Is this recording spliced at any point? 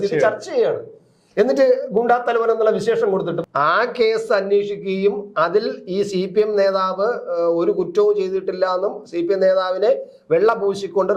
yes; 1 cut; at 3.3 s

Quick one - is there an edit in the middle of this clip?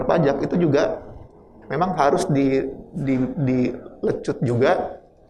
no; 0 cuts

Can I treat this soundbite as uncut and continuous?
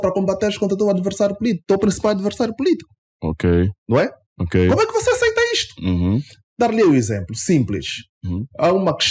yes; 0 cuts

